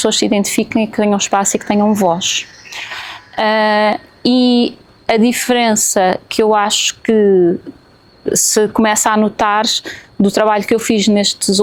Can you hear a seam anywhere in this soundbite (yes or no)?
no